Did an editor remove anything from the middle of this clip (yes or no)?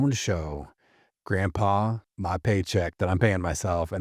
yes